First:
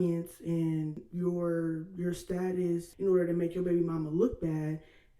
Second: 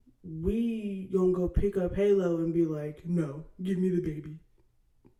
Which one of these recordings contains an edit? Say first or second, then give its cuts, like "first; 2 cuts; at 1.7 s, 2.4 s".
first; 2 cuts; at 1.0 s, 2.9 s